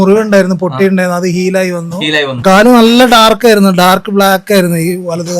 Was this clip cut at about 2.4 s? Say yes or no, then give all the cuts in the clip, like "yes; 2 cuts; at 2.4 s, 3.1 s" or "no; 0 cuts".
yes; 1 cut; at 2.4 s